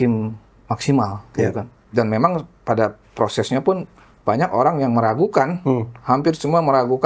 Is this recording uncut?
no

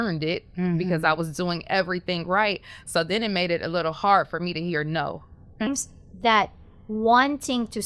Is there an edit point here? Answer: yes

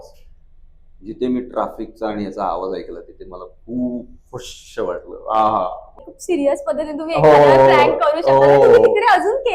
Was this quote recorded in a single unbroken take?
no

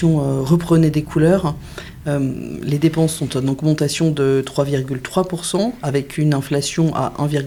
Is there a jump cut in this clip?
no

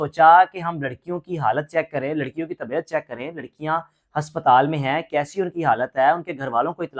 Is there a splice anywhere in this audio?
no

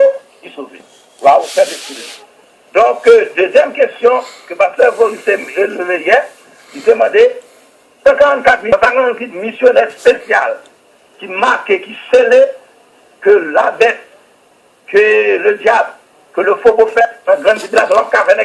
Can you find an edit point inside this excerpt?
yes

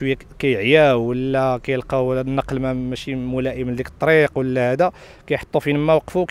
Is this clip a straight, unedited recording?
yes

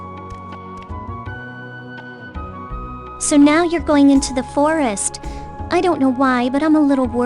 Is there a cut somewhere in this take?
yes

